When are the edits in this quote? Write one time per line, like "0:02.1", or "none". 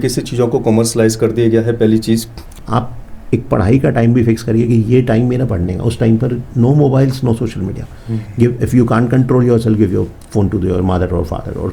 0:02.5